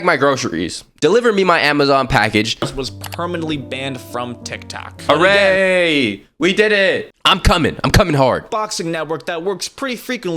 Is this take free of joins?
no; 4 cuts; at 0.9 s, 2.6 s, 7.1 s, 9.0 s

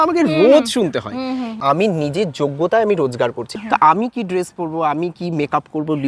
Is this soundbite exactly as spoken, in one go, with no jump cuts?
no; 2 cuts; at 1.6 s, 3.4 s

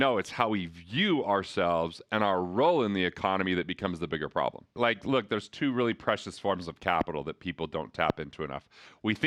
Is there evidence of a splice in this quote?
no; 0 cuts

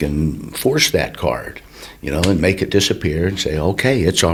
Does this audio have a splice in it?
no; 0 cuts

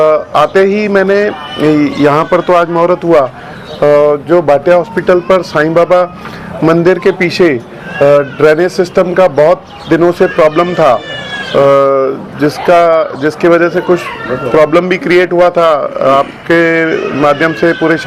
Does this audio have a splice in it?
no; 0 cuts

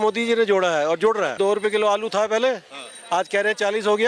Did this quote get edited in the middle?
yes; 1 cut; at 1.4 s

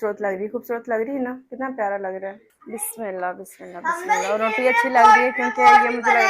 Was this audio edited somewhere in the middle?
yes; 1 cut; at 2.5 s

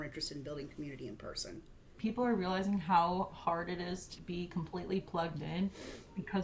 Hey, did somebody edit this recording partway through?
yes; 1 cut; at 1.9 s

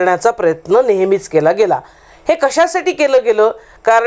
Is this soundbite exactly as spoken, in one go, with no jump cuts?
yes; 0 cuts

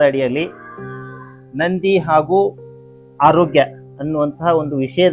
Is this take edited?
no; 0 cuts

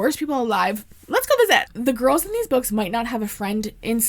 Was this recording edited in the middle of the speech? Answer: yes; 1 cut; at 1.6 s

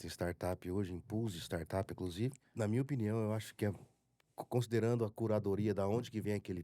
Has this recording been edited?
yes; 1 cut; at 2.4 s

